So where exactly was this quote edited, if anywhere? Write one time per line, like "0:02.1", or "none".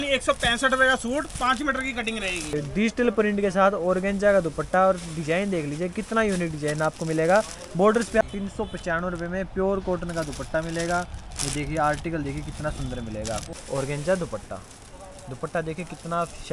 0:02.5
0:08.2
0:13.5